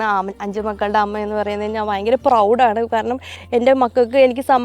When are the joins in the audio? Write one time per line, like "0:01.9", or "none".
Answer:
0:03.4